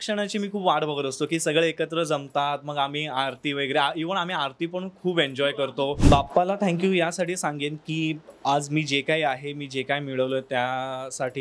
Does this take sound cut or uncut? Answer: cut